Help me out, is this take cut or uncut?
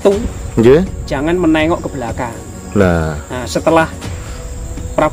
uncut